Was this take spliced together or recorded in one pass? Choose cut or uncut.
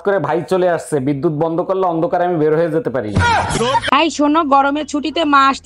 cut